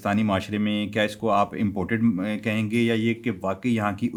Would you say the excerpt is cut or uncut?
uncut